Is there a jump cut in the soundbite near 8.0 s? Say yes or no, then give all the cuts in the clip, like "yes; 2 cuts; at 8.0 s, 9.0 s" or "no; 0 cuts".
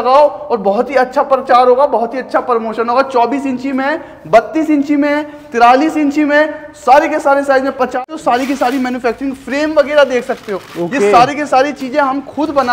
yes; 1 cut; at 8.0 s